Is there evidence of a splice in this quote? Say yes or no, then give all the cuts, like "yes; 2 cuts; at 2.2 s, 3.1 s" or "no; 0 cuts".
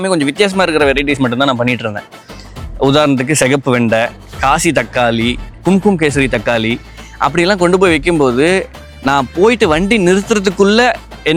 no; 0 cuts